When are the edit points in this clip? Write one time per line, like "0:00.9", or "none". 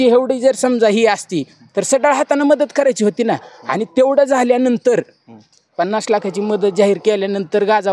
none